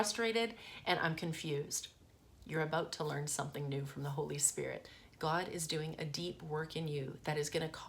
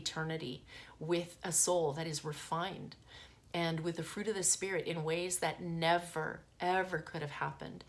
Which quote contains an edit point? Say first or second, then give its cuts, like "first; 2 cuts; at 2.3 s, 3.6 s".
first; 1 cut; at 4.8 s